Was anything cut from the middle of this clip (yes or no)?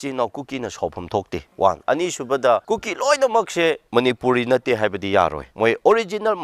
yes